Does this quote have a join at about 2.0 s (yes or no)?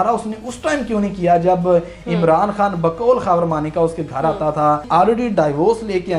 no